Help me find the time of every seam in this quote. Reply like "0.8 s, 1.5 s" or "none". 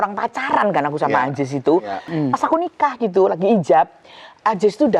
2.1 s